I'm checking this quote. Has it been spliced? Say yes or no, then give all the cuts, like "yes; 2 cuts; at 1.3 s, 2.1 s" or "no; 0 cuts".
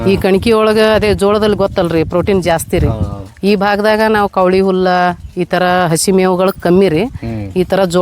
no; 0 cuts